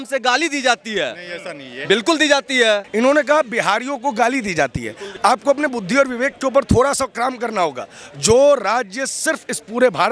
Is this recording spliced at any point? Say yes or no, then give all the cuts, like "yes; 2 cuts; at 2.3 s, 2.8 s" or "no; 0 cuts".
yes; 2 cuts; at 2.9 s, 5.0 s